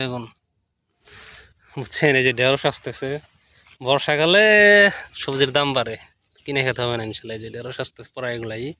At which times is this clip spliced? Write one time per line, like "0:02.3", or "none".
none